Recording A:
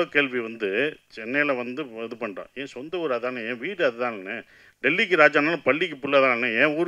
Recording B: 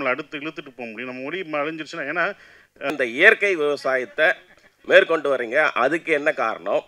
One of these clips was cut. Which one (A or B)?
B